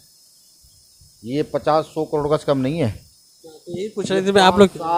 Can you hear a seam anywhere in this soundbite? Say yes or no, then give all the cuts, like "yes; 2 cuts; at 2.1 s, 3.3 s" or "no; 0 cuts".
no; 0 cuts